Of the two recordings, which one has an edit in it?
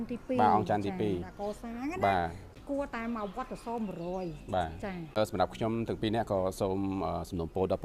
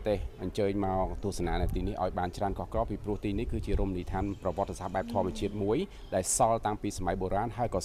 first; 2 cuts; at 2.6 s, 5.2 s

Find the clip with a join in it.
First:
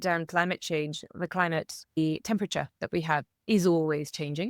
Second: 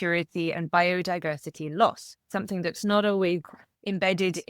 second; 1 cut; at 2.3 s

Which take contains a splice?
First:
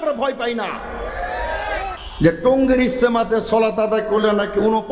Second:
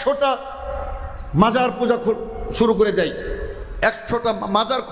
first; 1 cut; at 1.9 s

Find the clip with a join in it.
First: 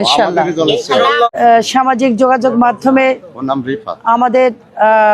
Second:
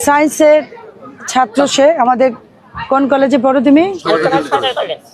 first; 1 cut; at 1.3 s

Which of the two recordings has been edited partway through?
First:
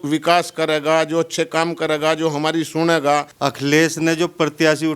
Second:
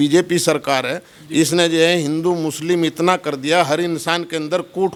first; 1 cut; at 3.3 s

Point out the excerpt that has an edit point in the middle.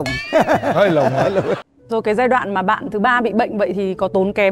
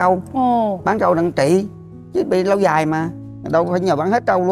first; 1 cut; at 1.7 s

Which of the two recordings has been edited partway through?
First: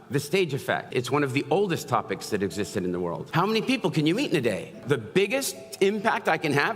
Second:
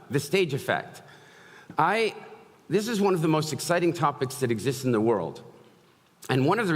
first; 3 cuts; at 0.9 s, 3.2 s, 4.8 s

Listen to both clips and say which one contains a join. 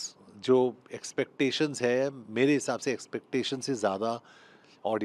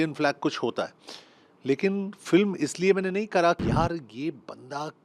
second; 1 cut; at 3.6 s

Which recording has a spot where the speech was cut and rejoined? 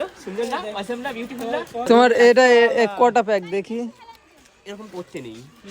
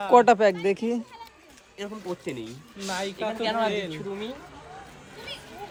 first; 1 cut; at 1.8 s

